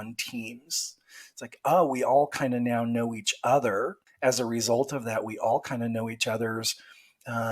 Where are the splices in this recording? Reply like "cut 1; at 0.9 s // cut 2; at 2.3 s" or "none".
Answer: cut 1; at 4.0 s

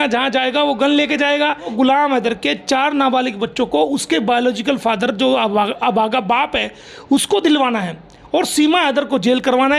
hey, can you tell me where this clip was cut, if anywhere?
cut 1; at 1.7 s

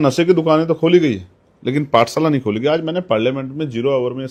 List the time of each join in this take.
none

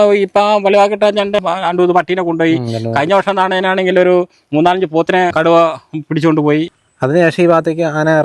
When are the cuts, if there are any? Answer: cut 1; at 1.4 s // cut 2; at 5.3 s // cut 3; at 6.7 s

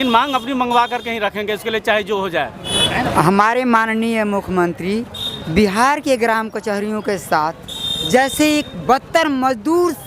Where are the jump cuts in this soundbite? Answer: cut 1; at 2.7 s

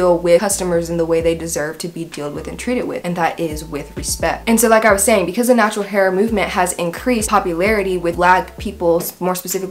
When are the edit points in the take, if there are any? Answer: none

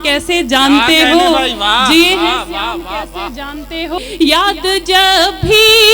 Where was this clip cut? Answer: cut 1; at 4.0 s

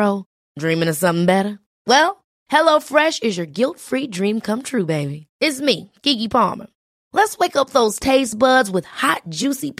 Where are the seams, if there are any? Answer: none

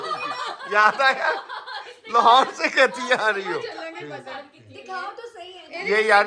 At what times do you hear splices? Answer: none

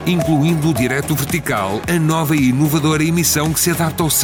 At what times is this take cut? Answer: none

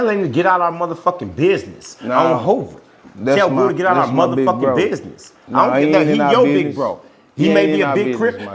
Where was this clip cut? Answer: none

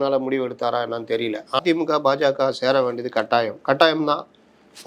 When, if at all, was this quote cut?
cut 1; at 1.6 s

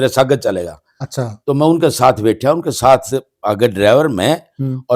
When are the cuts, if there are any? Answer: none

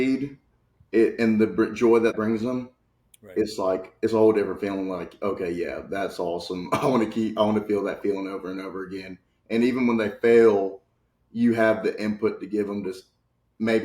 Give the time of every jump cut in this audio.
cut 1; at 2.1 s

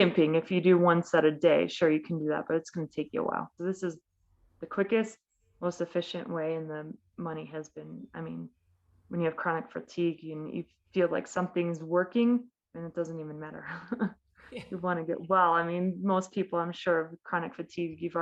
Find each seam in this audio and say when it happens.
cut 1; at 3.5 s

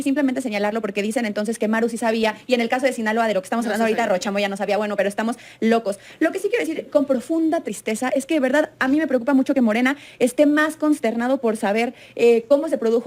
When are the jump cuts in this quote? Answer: none

